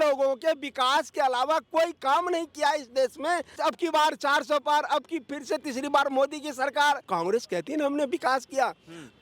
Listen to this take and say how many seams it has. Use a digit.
2